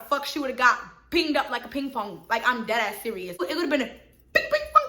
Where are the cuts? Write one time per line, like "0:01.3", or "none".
0:03.4